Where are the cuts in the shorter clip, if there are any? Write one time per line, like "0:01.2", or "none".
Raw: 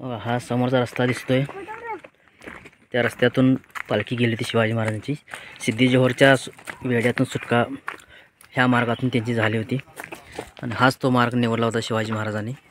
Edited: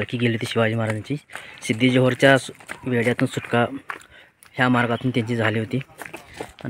none